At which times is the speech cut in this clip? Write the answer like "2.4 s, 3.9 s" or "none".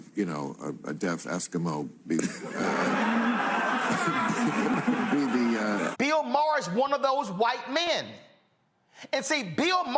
5.9 s